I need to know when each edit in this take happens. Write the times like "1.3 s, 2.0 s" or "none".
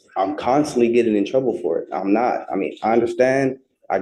none

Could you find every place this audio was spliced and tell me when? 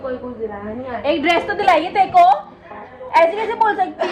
none

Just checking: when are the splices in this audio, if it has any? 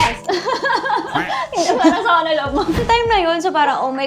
2.8 s

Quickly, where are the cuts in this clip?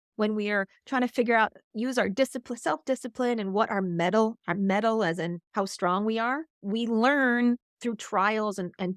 5.4 s, 6.5 s, 7.7 s

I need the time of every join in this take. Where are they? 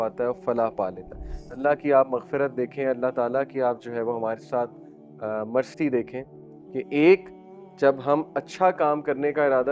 1.6 s

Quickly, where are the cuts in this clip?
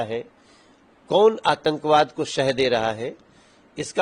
none

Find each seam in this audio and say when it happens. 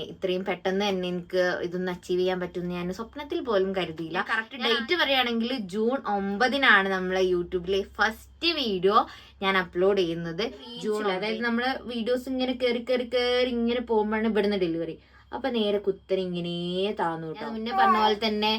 4.4 s, 11.0 s, 17.5 s

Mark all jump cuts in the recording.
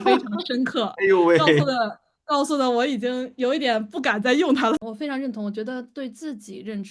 4.9 s

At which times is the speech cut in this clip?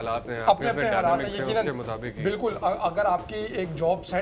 none

